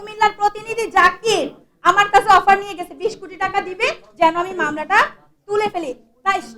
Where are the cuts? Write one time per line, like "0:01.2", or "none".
none